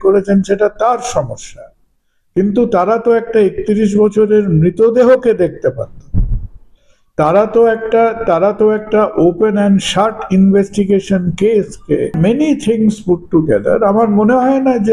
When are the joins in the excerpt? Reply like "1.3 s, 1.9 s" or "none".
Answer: 12.1 s